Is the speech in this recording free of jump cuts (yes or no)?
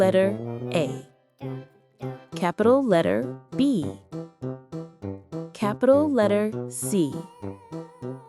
no